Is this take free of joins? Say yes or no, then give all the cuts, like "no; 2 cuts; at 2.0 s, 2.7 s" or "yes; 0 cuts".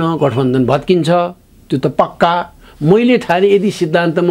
yes; 0 cuts